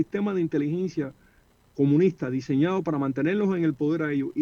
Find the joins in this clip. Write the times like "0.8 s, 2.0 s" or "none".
none